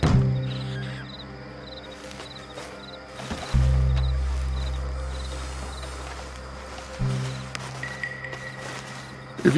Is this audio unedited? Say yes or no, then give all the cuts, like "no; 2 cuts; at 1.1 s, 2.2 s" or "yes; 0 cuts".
yes; 0 cuts